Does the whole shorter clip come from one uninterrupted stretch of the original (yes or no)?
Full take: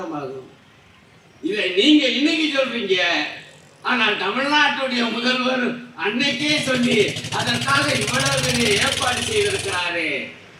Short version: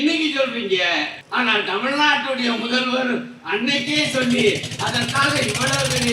no